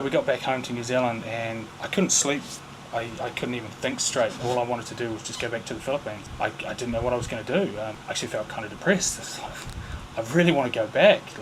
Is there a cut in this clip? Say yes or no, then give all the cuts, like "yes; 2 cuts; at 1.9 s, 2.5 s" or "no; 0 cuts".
no; 0 cuts